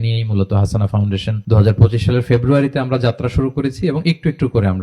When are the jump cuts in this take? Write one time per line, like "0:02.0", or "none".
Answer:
0:01.4